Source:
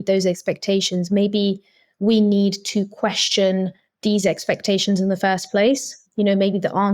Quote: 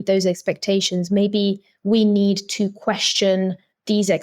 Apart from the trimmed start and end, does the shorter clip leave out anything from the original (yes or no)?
yes